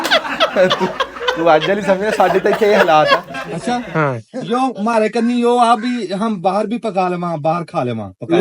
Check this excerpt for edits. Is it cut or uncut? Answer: cut